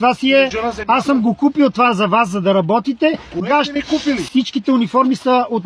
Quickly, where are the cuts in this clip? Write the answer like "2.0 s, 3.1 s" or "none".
none